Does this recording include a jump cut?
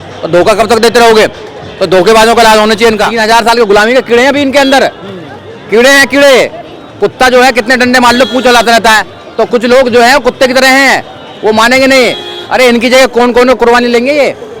yes; 1 cut; at 3.1 s

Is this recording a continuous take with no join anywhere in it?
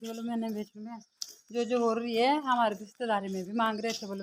yes; 0 cuts

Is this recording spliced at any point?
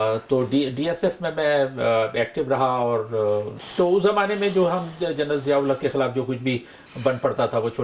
yes; 1 cut; at 3.6 s

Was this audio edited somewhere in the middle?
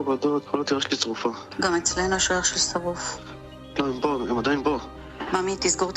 yes; 1 cut; at 4.9 s

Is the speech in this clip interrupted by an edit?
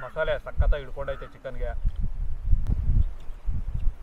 no; 0 cuts

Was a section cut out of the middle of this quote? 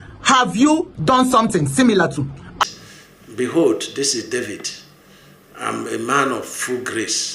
yes; 1 cut; at 2.6 s

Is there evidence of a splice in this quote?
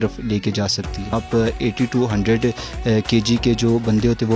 yes; 1 cut; at 1.1 s

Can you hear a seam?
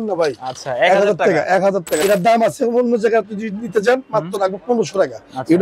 yes; 1 cut; at 2.0 s

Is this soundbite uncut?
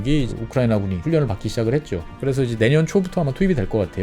no; 2 cuts; at 1.0 s, 2.1 s

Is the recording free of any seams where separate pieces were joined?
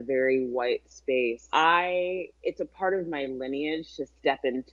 no; 2 cuts; at 1.4 s, 2.3 s

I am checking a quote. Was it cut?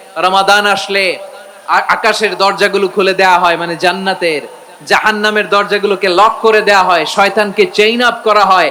no; 0 cuts

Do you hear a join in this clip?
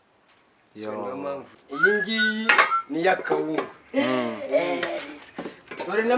yes; 1 cut; at 1.5 s

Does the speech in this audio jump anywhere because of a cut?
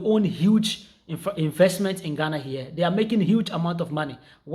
no; 0 cuts

